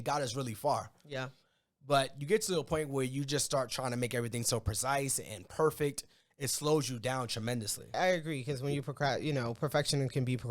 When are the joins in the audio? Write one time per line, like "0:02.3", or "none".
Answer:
0:07.9